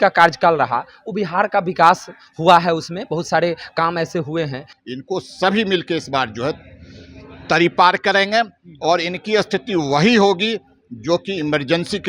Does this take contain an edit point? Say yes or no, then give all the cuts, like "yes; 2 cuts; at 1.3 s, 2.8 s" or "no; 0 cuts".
yes; 1 cut; at 4.7 s